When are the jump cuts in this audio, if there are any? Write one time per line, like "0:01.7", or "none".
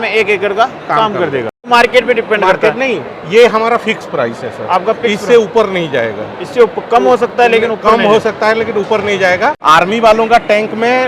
0:01.7
0:09.6